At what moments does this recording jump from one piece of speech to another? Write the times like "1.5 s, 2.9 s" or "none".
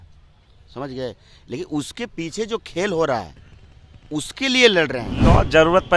5.1 s